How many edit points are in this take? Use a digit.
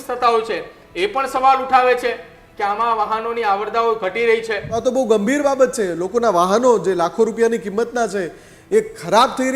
1